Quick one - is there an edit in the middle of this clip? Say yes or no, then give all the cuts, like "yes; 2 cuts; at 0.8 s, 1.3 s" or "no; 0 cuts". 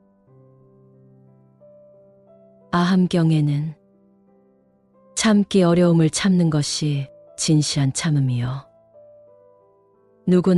yes; 2 cuts; at 1.4 s, 2.7 s